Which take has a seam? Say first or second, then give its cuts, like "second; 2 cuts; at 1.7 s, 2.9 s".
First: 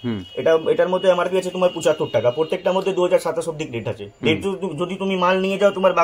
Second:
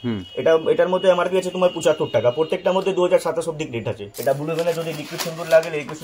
second; 1 cut; at 4.0 s